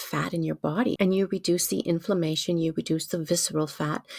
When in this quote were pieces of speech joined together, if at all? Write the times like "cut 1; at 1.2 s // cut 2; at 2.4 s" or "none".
cut 1; at 0.9 s